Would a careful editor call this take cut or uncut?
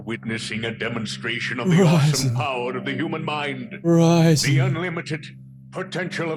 uncut